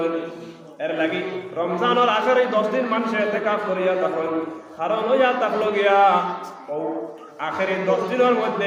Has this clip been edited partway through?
no; 0 cuts

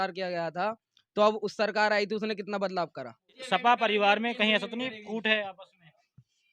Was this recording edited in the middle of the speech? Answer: yes; 1 cut; at 3.4 s

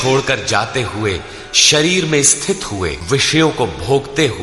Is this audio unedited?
no; 1 cut; at 3.0 s

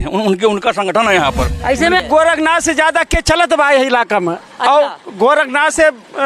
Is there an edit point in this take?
yes; 1 cut; at 2.0 s

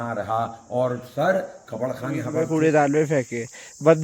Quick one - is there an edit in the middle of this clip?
yes; 1 cut; at 2.4 s

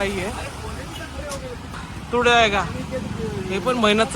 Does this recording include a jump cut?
yes; 1 cut; at 1.8 s

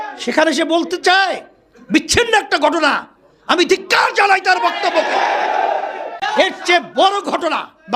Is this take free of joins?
no; 1 cut; at 6.2 s

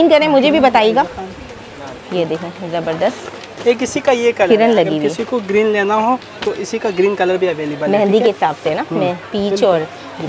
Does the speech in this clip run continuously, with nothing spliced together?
yes; 0 cuts

